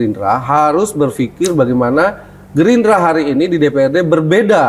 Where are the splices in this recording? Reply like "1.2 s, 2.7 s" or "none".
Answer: none